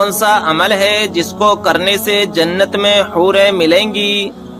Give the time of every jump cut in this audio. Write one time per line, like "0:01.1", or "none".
none